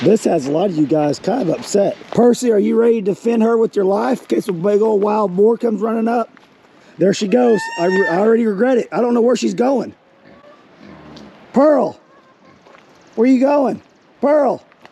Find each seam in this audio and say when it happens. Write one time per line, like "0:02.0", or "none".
0:02.0
0:06.8